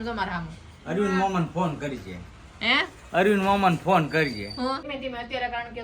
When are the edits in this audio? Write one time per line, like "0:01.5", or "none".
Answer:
0:04.9